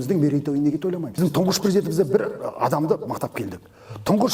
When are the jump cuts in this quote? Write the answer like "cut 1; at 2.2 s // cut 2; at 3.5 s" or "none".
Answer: cut 1; at 1.2 s

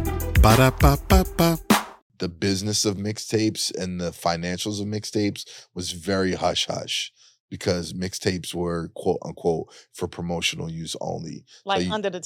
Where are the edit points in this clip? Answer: cut 1; at 2.1 s

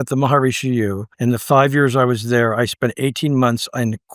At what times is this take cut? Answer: cut 1; at 1.1 s

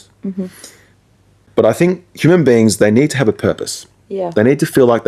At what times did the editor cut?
cut 1; at 1.3 s

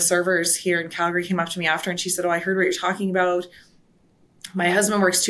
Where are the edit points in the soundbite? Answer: none

